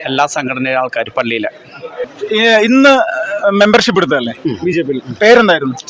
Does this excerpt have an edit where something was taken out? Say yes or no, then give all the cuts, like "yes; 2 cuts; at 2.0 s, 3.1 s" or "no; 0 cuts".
yes; 1 cut; at 2.1 s